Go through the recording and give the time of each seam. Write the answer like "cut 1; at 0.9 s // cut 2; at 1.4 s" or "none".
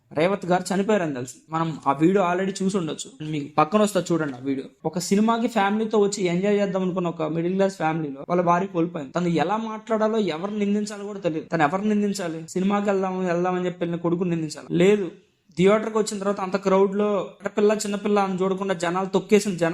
none